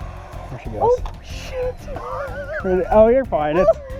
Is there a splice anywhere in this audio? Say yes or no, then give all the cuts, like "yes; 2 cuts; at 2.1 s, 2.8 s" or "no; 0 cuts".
no; 0 cuts